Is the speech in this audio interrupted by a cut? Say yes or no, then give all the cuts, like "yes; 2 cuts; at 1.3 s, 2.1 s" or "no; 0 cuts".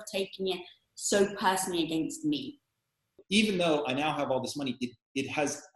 yes; 1 cut; at 3.2 s